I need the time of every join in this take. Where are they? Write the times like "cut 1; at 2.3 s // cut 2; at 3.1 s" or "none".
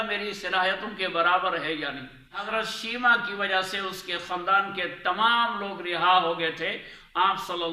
cut 1; at 2.5 s